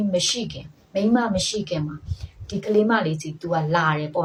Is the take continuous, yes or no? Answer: yes